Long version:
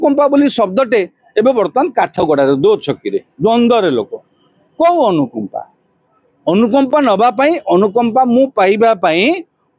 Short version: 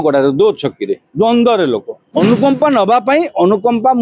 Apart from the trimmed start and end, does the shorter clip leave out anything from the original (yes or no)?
yes